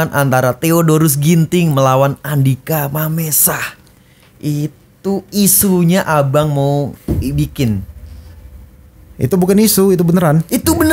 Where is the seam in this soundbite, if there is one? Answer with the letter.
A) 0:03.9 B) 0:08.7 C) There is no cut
C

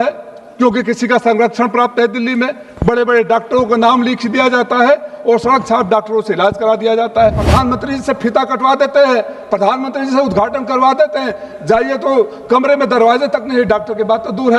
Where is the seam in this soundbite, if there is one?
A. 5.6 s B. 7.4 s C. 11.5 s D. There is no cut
B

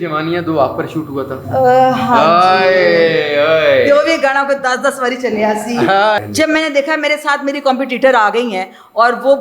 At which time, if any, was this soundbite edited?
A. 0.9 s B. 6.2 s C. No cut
B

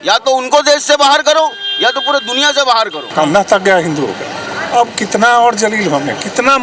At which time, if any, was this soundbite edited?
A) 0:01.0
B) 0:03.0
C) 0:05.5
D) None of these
B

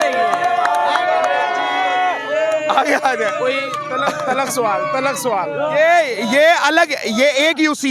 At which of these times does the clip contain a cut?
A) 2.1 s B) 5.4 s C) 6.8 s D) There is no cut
D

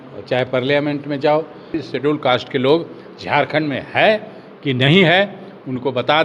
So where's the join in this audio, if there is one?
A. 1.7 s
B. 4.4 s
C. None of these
A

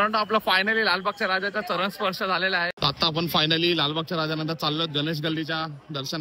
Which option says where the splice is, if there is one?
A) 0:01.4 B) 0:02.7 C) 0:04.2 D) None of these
B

